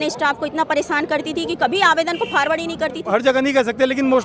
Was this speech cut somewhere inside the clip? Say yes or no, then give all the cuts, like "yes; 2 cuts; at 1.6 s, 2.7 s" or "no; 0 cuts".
yes; 1 cut; at 3.0 s